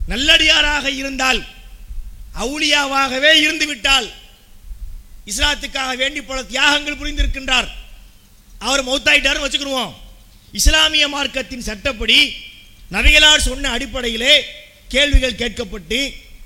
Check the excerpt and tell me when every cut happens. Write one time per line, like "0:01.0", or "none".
none